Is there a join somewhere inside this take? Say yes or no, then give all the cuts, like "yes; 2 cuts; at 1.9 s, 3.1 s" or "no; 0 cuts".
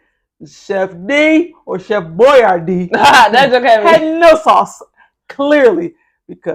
no; 0 cuts